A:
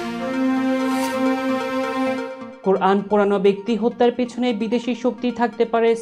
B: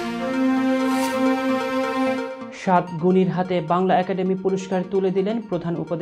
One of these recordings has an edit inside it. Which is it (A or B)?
A